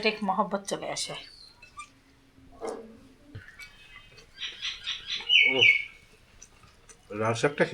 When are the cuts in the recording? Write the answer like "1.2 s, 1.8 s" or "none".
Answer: none